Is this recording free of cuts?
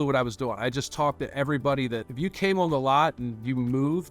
no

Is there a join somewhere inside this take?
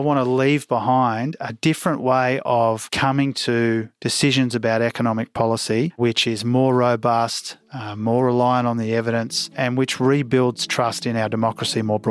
yes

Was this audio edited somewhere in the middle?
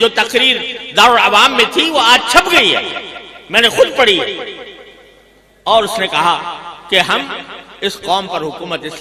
no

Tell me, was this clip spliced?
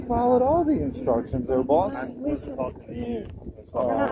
no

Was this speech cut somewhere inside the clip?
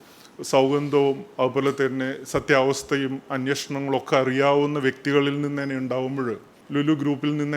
yes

